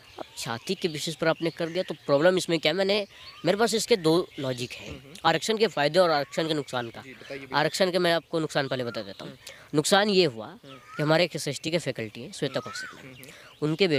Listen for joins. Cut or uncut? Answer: uncut